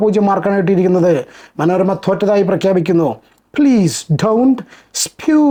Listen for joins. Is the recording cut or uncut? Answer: uncut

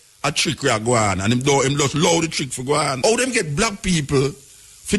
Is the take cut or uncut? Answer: cut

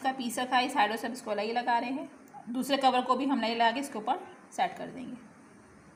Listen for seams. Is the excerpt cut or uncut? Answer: uncut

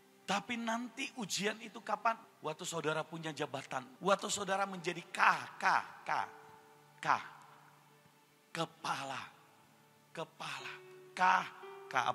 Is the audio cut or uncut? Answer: cut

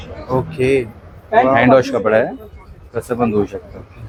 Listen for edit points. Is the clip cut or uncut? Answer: uncut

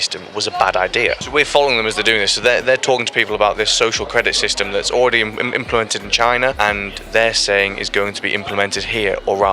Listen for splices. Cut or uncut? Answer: cut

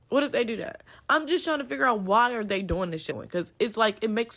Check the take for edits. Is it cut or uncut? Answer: cut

